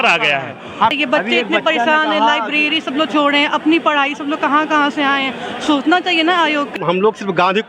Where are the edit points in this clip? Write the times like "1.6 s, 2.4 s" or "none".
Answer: 0.9 s, 6.7 s